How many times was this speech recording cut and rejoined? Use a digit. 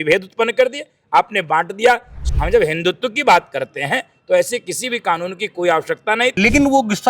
2